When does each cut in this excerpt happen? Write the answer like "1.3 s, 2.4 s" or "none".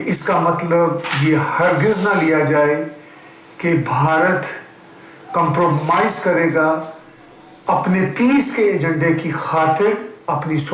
none